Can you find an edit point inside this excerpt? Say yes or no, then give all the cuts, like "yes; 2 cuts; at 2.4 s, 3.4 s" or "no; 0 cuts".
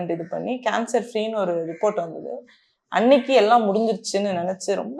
no; 0 cuts